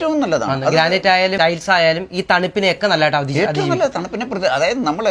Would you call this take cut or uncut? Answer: cut